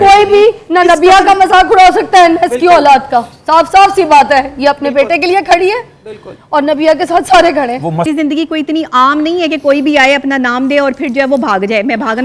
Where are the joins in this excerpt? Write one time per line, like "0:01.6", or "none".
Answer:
0:08.1